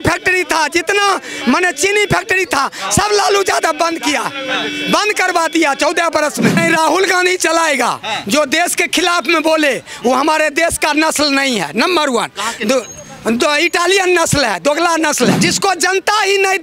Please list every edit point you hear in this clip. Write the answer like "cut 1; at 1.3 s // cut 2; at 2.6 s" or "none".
cut 1; at 6.6 s // cut 2; at 15.5 s

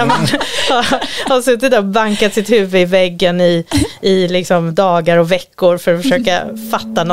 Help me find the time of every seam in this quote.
none

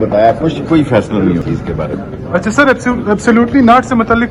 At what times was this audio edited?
cut 1; at 1.4 s

